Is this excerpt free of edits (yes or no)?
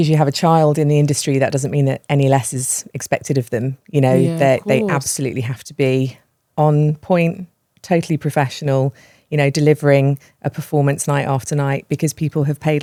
yes